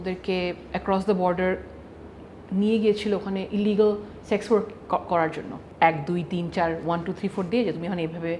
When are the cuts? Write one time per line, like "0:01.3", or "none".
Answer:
0:05.6